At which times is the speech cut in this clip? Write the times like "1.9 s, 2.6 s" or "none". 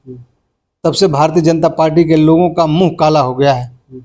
none